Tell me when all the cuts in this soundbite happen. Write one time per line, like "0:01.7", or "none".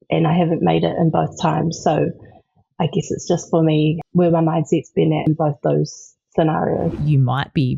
0:04.0
0:05.3
0:07.0